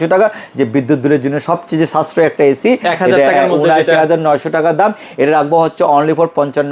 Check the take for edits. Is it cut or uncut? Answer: uncut